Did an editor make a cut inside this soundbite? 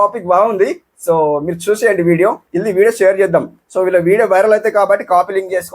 yes; 1 cut; at 2.5 s

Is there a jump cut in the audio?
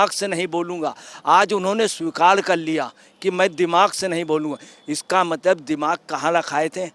no; 0 cuts

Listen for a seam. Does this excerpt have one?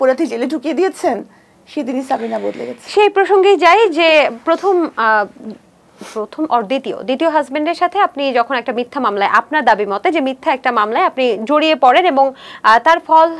no; 0 cuts

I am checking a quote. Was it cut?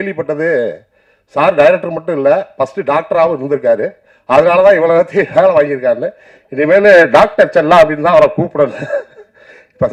no; 0 cuts

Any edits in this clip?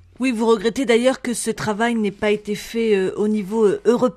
no; 0 cuts

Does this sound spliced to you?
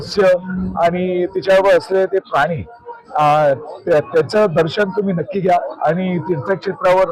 no; 0 cuts

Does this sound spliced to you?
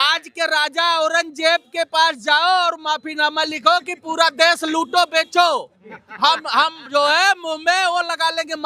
no; 0 cuts

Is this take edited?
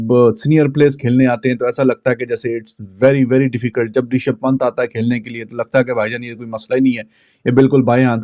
no; 0 cuts

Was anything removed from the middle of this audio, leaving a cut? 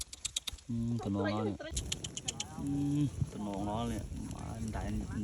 yes; 1 cut; at 1.7 s

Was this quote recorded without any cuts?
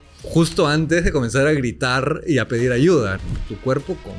no; 1 cut; at 3.2 s

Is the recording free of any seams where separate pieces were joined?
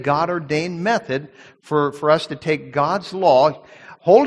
yes; 0 cuts

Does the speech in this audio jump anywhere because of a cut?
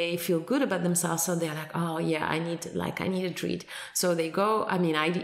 no; 0 cuts

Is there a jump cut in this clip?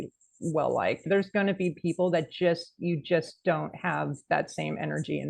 yes; 1 cut; at 1.0 s

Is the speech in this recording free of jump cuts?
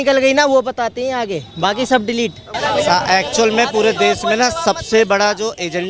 no; 1 cut; at 2.4 s

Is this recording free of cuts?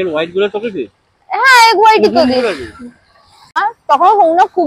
no; 1 cut; at 3.6 s

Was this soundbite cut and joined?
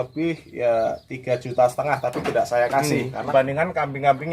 yes; 1 cut; at 3.3 s

